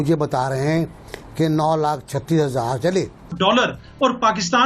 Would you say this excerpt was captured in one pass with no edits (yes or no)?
no